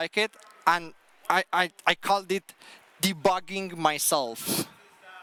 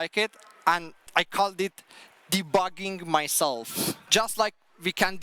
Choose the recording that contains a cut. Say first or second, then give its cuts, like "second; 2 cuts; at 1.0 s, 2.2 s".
second; 2 cuts; at 1.0 s, 4.0 s